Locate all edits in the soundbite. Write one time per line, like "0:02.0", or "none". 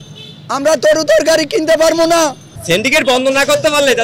0:02.5